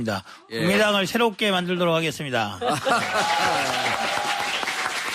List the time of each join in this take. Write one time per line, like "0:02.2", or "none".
none